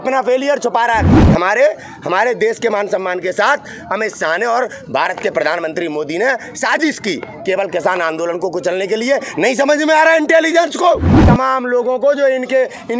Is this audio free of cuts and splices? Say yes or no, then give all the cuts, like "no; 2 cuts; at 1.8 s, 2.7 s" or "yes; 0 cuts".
no; 2 cuts; at 1.2 s, 11.1 s